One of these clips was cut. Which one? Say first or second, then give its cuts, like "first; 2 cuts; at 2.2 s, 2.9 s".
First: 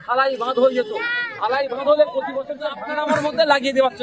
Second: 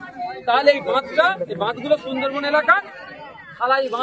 first; 1 cut; at 2.8 s